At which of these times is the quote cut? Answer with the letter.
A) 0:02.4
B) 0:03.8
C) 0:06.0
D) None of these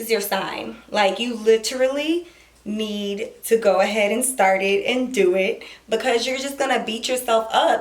D